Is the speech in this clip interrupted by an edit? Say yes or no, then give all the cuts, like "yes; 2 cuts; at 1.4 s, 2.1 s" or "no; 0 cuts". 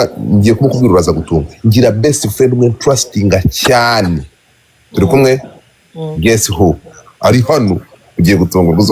no; 0 cuts